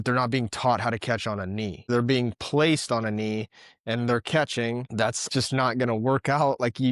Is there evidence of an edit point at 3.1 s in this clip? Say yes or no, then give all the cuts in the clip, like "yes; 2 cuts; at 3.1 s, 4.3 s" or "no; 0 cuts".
no; 2 cuts; at 1.9 s, 5.2 s